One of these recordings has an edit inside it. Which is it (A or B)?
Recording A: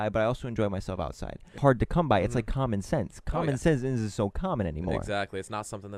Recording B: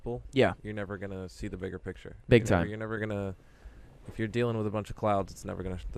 A